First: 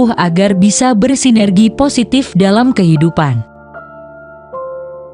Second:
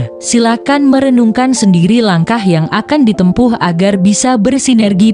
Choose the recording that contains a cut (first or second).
first